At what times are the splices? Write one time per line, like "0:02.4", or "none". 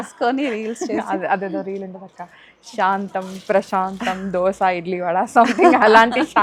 none